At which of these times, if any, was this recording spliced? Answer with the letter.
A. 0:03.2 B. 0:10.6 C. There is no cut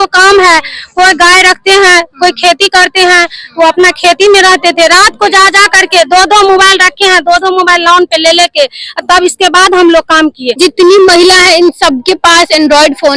B